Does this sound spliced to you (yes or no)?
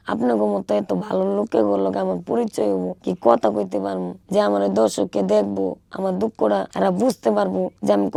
no